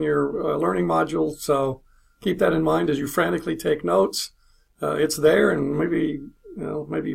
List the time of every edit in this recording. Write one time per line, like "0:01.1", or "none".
0:01.2

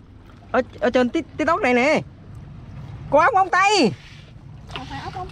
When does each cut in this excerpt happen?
none

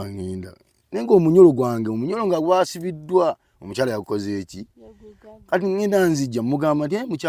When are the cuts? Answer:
none

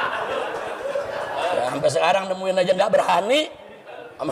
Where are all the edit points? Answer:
none

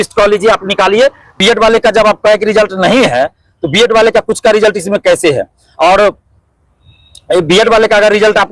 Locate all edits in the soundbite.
0:01.4

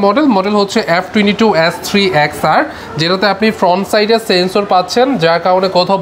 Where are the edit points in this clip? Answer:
none

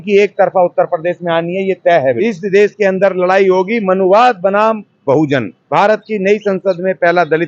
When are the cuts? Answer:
0:02.1
0:05.6

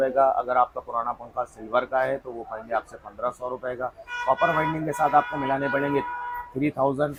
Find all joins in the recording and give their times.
none

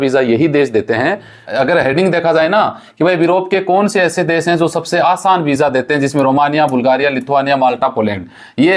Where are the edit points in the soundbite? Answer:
0:01.5

